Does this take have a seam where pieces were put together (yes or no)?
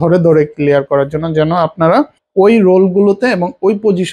yes